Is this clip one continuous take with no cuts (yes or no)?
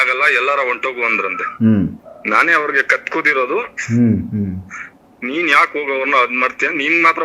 no